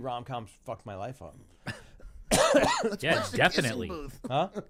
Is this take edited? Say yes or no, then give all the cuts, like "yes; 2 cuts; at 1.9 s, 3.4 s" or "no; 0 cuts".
no; 0 cuts